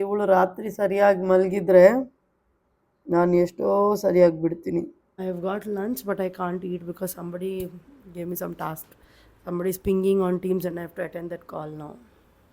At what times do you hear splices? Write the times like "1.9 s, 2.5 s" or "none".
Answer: 5.2 s